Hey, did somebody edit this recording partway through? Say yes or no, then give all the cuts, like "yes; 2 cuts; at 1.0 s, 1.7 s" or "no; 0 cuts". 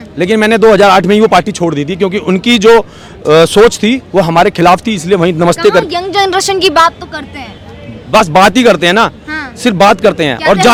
no; 0 cuts